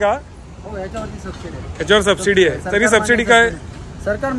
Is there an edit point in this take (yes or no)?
no